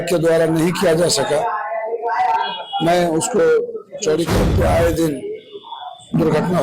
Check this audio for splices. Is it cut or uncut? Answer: cut